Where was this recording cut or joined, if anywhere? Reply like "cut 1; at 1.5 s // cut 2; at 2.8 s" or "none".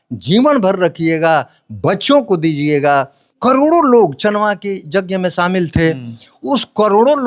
cut 1; at 3.3 s